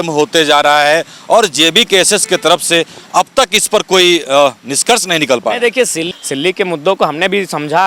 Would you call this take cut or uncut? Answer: cut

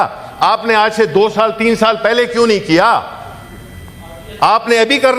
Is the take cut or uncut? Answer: uncut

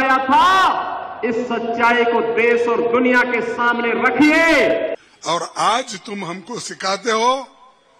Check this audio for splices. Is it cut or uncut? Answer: cut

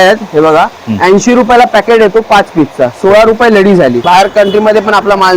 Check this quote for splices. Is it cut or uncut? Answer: cut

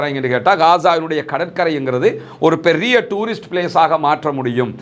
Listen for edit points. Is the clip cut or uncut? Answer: uncut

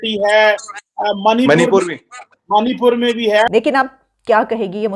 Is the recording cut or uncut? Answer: cut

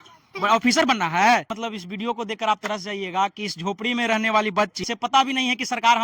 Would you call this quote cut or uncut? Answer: cut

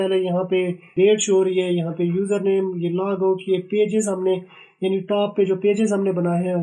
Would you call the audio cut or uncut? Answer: cut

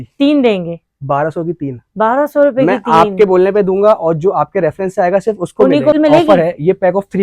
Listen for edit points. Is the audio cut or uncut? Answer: cut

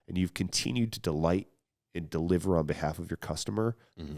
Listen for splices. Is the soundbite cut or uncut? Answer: uncut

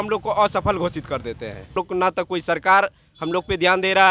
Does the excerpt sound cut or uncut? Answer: cut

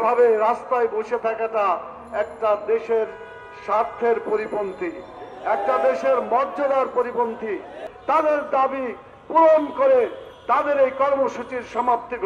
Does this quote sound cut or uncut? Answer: cut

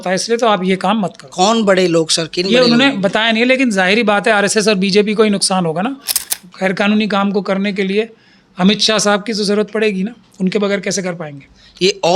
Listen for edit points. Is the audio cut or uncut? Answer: cut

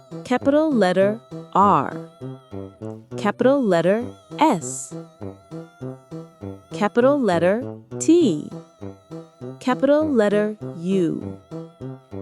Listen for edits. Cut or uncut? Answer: cut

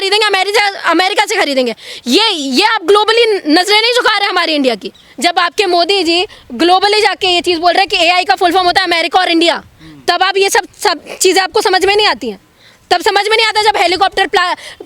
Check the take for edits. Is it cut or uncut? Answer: cut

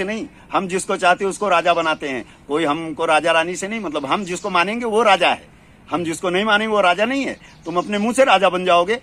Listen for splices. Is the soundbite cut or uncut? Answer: uncut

